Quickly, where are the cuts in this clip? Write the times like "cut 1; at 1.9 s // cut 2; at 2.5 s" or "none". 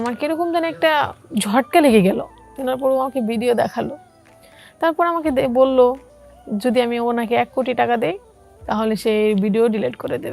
cut 1; at 2.5 s